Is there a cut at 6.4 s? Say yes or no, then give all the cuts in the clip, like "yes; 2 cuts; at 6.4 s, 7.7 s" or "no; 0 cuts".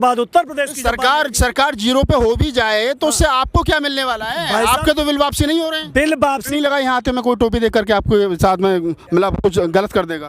yes; 1 cut; at 6.4 s